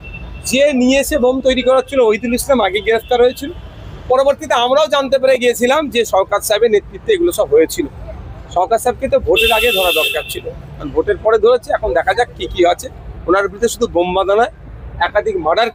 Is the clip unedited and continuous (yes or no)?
yes